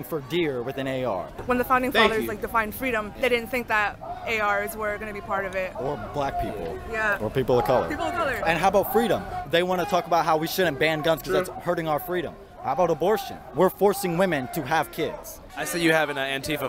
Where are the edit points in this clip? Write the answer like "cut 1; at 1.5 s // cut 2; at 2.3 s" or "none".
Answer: none